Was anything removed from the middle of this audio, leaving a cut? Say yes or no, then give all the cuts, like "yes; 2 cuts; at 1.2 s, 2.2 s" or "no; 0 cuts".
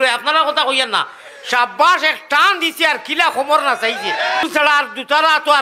yes; 1 cut; at 4.4 s